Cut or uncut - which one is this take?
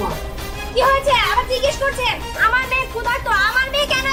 uncut